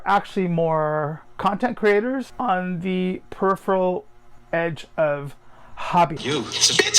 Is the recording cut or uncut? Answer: cut